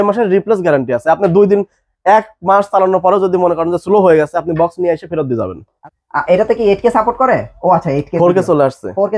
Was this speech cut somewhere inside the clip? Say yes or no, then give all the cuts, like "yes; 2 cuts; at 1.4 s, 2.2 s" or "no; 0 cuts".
yes; 1 cut; at 5.7 s